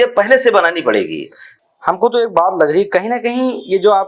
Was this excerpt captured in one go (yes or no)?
yes